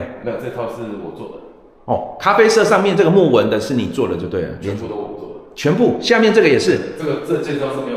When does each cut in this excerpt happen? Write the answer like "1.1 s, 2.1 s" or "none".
none